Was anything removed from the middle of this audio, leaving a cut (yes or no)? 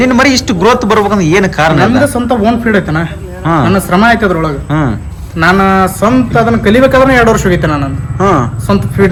no